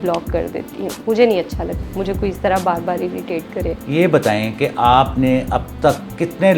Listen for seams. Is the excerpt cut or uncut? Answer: cut